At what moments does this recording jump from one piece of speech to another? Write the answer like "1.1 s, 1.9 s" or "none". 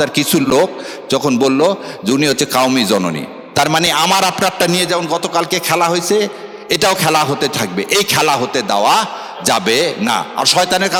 none